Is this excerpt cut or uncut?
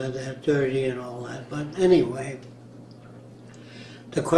uncut